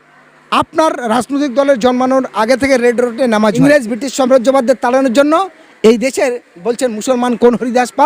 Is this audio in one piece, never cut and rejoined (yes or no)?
no